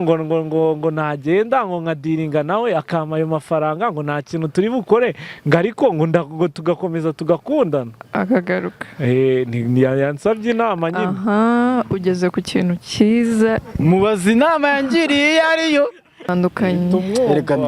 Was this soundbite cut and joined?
yes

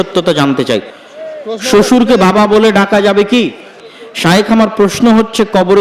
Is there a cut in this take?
yes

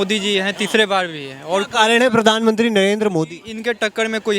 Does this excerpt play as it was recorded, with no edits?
yes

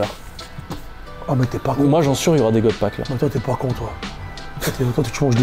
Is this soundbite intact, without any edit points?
yes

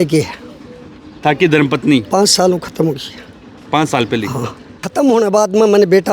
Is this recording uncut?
no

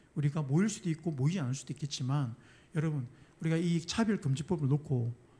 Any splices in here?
no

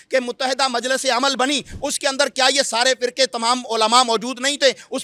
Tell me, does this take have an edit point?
no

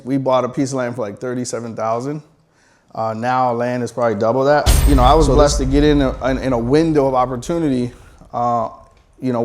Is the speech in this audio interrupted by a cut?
yes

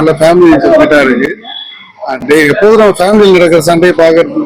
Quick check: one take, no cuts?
yes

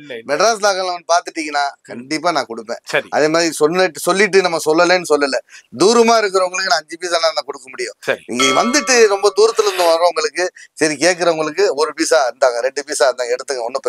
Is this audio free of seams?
yes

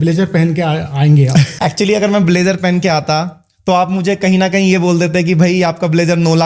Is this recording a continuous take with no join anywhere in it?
no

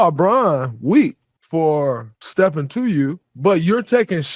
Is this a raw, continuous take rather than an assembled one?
no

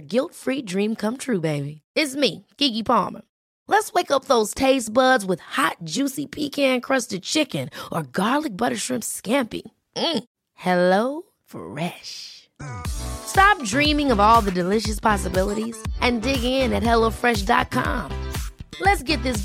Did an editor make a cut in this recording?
no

